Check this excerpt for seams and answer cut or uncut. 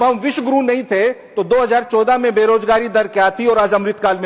uncut